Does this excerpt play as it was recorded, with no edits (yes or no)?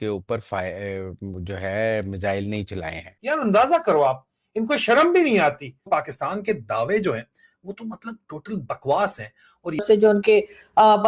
yes